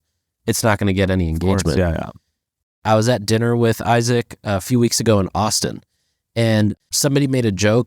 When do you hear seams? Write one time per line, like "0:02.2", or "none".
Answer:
0:02.8